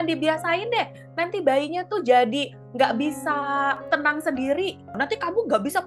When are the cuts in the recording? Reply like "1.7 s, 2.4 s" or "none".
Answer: 4.9 s